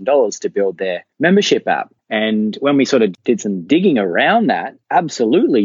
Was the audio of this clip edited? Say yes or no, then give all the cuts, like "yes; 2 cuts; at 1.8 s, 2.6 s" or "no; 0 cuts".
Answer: no; 0 cuts